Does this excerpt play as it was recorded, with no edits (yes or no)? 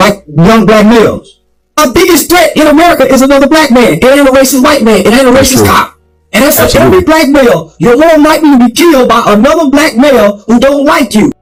yes